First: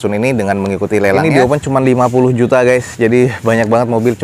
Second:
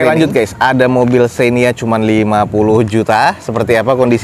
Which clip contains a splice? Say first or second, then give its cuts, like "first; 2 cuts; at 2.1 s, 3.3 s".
first; 1 cut; at 1.2 s